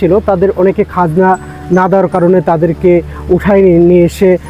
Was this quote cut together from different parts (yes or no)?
no